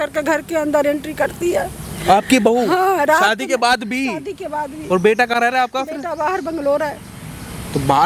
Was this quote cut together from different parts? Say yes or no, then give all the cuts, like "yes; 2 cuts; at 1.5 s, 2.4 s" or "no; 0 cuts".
no; 0 cuts